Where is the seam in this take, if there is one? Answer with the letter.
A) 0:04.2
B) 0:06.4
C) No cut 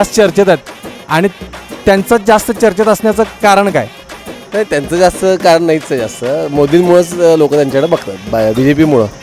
B